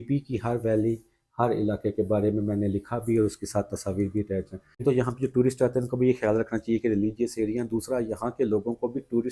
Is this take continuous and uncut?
no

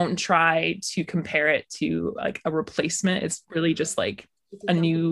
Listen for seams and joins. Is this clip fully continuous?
no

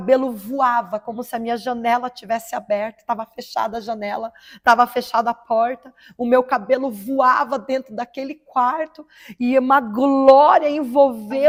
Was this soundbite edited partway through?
no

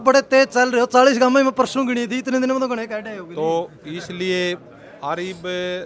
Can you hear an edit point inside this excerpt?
no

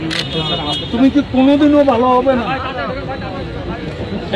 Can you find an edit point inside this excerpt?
no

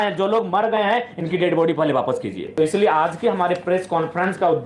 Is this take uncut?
no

